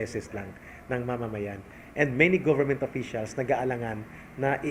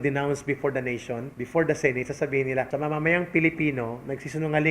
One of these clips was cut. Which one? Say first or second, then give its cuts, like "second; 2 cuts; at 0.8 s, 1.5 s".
second; 2 cuts; at 1.3 s, 2.7 s